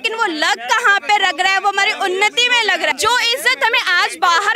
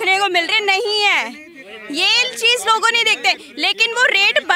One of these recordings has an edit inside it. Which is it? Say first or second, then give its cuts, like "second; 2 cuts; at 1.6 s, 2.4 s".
first; 1 cut; at 2.9 s